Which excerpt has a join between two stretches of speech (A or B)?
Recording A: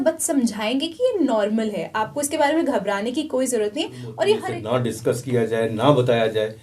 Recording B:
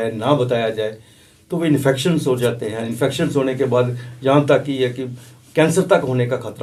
A